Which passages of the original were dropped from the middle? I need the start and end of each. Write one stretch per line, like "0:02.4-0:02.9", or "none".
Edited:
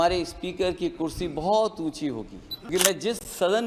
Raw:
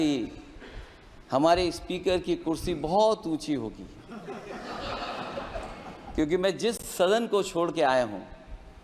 0:04.2-0:06.3